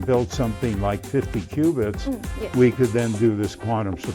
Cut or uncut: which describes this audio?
uncut